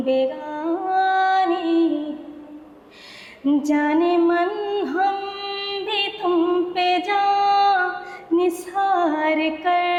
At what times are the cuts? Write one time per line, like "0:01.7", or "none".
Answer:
none